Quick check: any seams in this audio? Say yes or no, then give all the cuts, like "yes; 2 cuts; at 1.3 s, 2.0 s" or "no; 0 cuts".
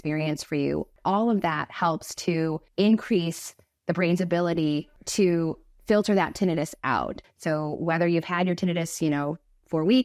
yes; 4 cuts; at 0.9 s, 2.6 s, 5.0 s, 7.2 s